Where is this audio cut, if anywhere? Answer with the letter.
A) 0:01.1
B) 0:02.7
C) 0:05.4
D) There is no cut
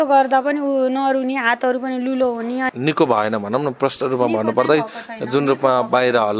B